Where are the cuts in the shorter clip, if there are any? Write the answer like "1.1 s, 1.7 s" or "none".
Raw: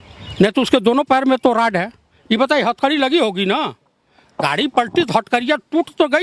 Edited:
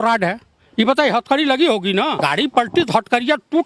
2.1 s